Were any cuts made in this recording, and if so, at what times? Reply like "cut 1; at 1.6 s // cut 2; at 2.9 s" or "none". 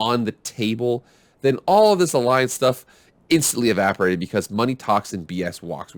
none